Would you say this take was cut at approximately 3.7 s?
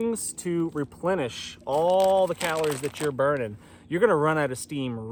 no; 0 cuts

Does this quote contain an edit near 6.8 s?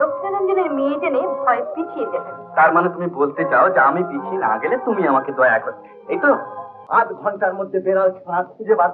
yes; 1 cut; at 6.8 s

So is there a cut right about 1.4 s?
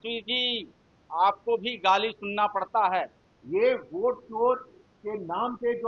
no; 1 cut; at 3.3 s

